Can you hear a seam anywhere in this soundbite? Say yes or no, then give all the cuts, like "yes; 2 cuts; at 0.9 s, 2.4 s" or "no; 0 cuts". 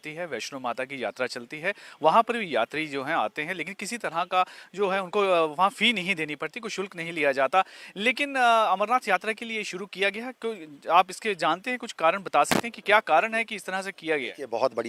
no; 0 cuts